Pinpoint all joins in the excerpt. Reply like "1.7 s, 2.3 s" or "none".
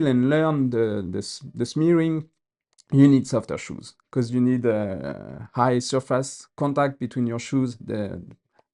none